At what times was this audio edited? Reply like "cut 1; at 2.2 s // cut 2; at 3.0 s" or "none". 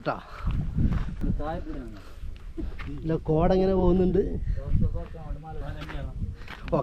cut 1; at 1.1 s // cut 2; at 5.6 s

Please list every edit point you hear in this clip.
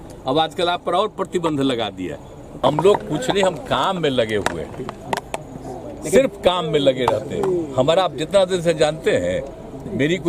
cut 1; at 2.6 s

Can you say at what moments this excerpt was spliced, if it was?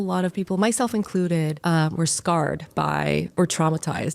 cut 1; at 1.6 s

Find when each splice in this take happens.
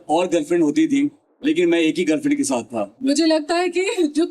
cut 1; at 3.0 s

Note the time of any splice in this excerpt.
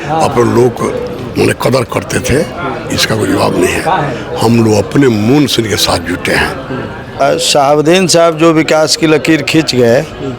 cut 1; at 7.2 s

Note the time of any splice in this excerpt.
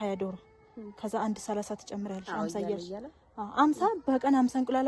none

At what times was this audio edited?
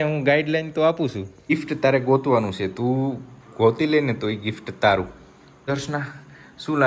cut 1; at 1.5 s // cut 2; at 5.7 s

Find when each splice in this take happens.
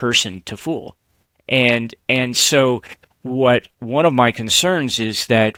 none

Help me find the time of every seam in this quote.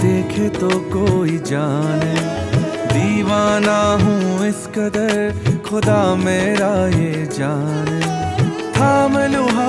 none

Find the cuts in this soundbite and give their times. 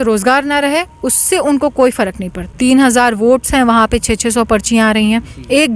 cut 1; at 2.5 s

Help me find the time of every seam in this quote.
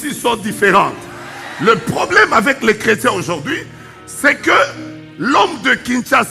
none

